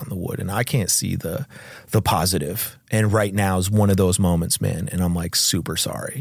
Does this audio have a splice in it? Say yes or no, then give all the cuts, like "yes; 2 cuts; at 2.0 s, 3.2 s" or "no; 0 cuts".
no; 0 cuts